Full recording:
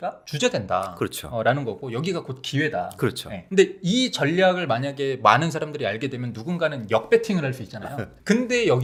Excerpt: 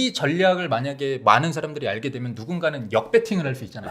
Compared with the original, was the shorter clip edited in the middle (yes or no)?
no